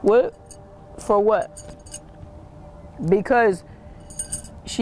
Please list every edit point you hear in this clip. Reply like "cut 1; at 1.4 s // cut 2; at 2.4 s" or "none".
none